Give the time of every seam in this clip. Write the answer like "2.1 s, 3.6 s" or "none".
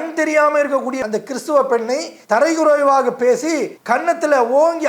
1.0 s